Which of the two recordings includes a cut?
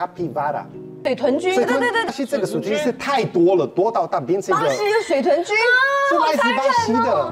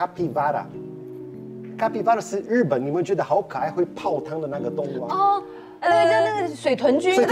first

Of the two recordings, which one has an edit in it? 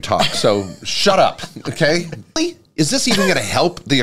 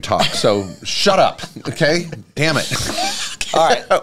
first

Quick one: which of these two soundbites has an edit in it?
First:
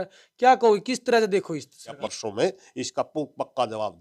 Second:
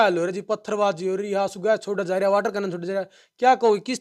first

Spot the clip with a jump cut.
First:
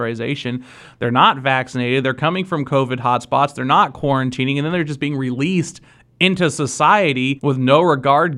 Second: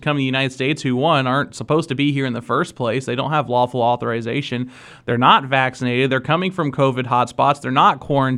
first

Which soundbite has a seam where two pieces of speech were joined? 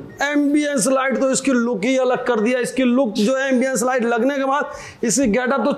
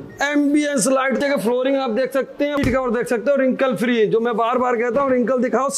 second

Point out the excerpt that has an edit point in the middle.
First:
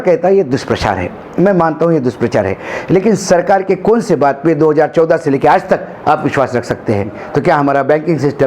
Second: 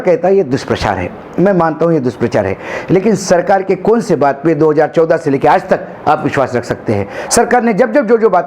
first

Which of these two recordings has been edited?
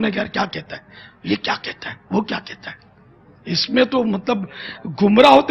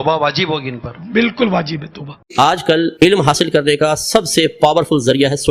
second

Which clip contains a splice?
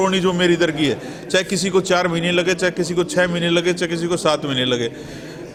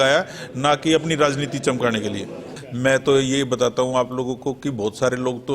second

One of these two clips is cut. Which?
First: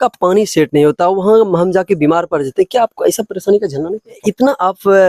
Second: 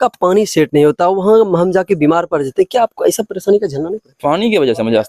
first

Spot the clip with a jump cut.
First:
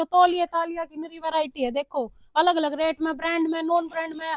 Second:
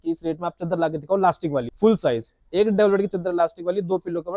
second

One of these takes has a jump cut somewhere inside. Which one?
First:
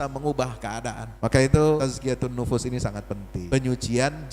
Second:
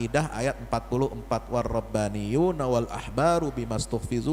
first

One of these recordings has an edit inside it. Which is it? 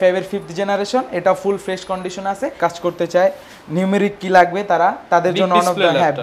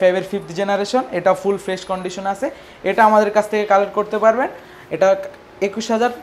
first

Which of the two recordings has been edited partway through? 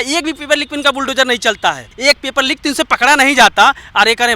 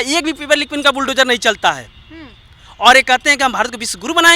first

